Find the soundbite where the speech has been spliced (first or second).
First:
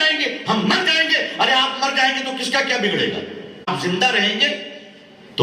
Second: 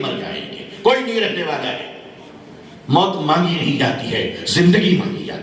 first